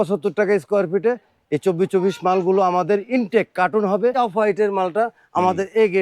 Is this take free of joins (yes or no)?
no